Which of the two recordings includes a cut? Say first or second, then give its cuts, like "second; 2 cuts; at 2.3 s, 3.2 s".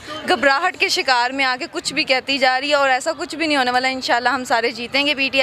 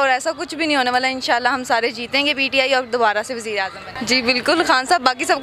second; 1 cut; at 3.9 s